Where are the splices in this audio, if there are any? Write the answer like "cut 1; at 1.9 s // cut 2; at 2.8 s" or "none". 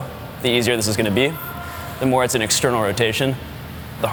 none